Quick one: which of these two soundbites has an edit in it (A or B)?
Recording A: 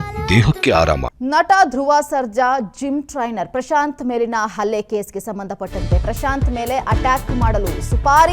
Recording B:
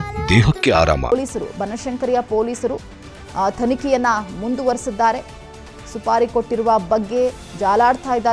A